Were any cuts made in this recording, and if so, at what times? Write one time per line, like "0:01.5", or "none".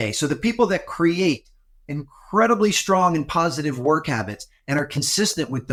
none

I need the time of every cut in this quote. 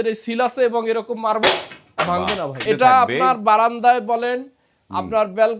0:02.6

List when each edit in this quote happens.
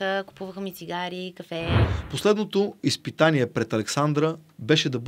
0:01.8

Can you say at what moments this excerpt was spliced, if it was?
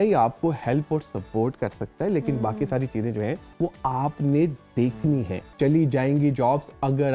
0:03.4
0:05.5

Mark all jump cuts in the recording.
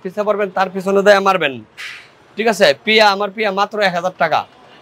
none

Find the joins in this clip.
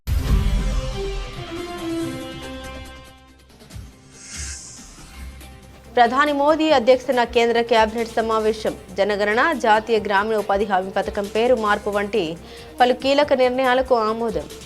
0:04.9
0:05.9

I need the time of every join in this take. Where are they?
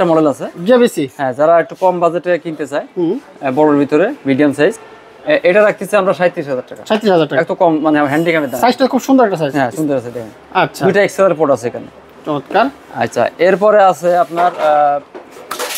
none

